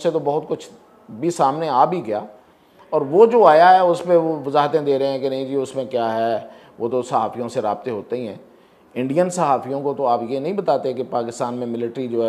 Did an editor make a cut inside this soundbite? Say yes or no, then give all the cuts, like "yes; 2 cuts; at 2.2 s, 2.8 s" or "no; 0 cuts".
no; 0 cuts